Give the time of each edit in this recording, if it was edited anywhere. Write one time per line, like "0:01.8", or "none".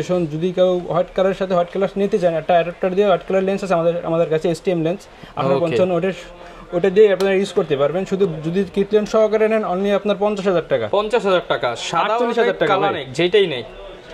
none